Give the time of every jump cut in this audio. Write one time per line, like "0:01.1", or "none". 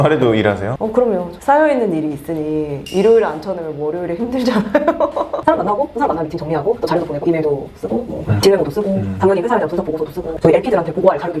0:00.9
0:05.4